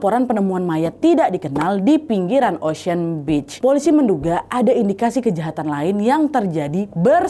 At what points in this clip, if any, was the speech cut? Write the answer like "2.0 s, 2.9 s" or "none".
3.5 s